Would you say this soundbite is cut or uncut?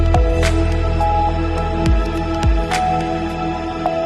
uncut